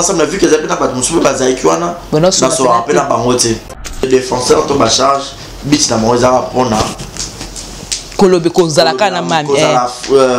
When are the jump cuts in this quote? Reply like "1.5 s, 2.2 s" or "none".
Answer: 3.7 s